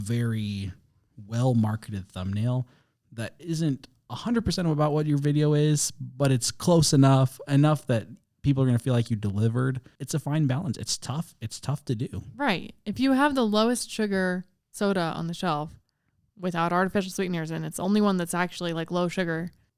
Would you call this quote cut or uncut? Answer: uncut